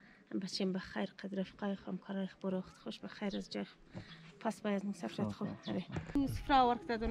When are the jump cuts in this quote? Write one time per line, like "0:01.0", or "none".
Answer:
0:06.1